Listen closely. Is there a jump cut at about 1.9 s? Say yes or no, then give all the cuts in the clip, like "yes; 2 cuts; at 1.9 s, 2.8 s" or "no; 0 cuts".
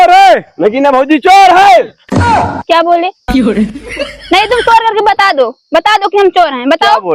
no; 0 cuts